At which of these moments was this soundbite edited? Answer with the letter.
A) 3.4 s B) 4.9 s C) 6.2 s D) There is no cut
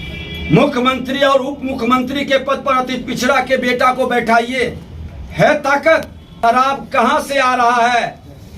C